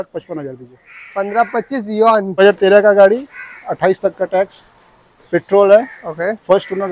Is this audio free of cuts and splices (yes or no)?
no